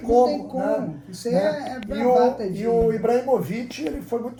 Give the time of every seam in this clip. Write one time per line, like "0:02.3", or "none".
none